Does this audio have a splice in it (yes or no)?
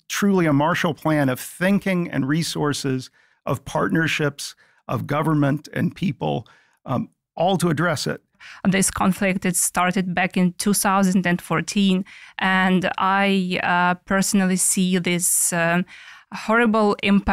yes